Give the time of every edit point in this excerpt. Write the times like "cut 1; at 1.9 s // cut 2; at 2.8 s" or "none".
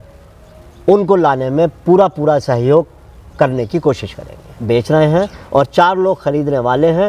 cut 1; at 4.6 s